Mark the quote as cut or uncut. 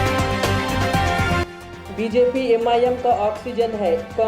cut